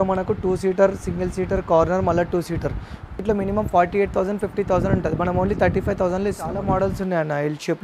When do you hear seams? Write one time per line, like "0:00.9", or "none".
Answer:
0:03.1
0:06.6